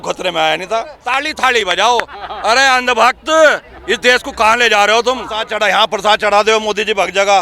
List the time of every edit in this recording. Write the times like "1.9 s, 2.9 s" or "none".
1.0 s, 5.5 s